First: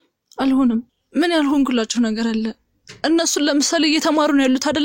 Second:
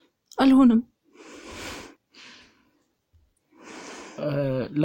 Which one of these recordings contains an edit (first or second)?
first